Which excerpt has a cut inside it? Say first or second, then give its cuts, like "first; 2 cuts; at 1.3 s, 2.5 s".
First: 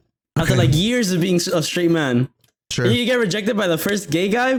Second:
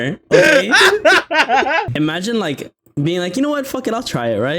second; 1 cut; at 1.9 s